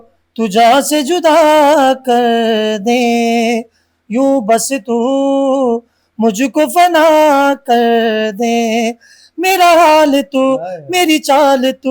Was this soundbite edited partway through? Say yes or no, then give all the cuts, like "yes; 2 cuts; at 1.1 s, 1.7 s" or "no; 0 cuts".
no; 0 cuts